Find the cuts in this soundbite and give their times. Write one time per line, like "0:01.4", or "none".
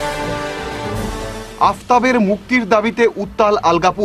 0:00.9

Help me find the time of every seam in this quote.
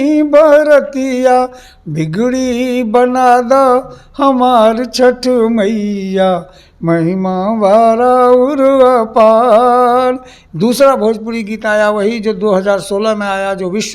0:10.4

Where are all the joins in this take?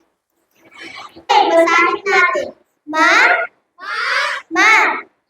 0:01.3

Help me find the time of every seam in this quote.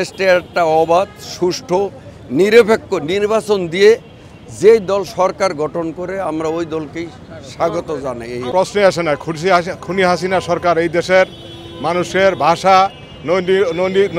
0:08.4

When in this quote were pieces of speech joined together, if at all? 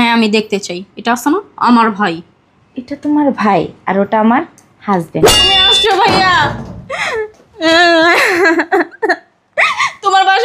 0:05.6

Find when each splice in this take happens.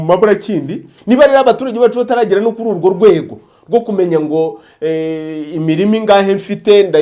0:00.9

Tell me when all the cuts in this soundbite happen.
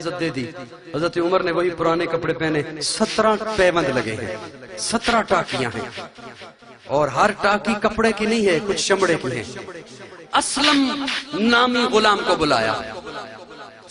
none

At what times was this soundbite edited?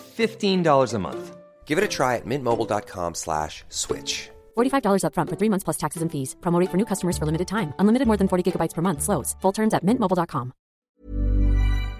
0:10.8

